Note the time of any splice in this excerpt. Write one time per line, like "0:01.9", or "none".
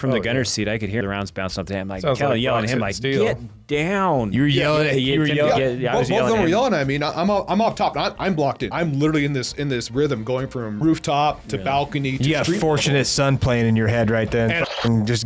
0:01.0
0:08.7
0:10.8